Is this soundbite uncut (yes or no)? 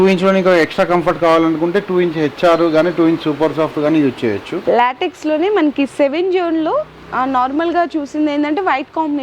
no